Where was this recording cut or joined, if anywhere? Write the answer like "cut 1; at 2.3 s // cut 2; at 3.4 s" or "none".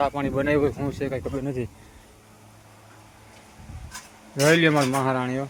none